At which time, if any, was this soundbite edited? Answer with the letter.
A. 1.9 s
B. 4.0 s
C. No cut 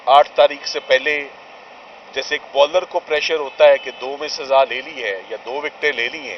C